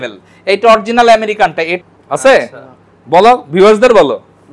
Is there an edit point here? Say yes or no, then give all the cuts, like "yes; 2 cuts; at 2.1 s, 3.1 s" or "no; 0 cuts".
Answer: yes; 1 cut; at 1.7 s